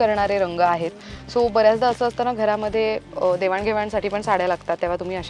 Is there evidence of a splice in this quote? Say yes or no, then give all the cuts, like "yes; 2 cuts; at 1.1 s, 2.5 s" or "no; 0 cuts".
no; 0 cuts